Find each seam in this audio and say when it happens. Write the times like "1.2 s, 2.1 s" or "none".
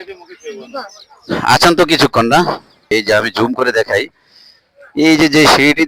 2.9 s